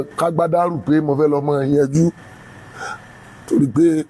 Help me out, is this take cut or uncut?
uncut